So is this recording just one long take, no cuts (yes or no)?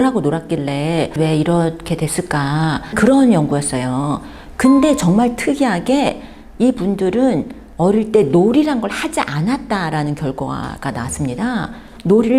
yes